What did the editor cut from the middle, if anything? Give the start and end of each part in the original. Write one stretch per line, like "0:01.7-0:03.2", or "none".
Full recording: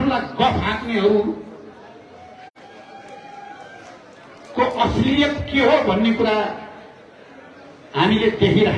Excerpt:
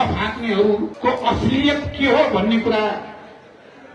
0:01.4-0:04.5